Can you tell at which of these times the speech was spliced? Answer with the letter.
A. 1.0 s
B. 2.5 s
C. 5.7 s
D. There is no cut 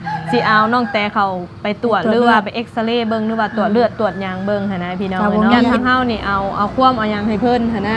C